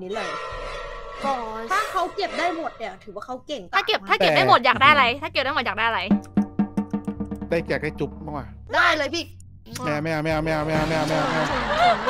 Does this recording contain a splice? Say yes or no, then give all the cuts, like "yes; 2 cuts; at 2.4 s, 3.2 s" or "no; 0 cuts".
yes; 2 cuts; at 3.7 s, 8.7 s